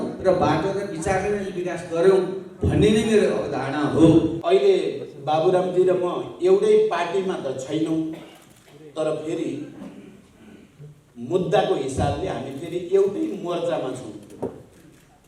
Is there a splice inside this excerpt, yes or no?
yes